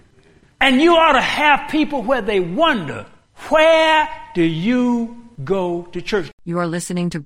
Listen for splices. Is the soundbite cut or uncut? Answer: cut